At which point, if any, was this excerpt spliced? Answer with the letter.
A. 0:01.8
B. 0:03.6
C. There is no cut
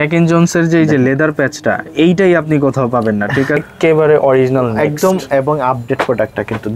B